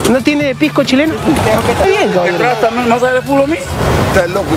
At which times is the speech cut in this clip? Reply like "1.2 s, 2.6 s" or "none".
1.8 s, 3.5 s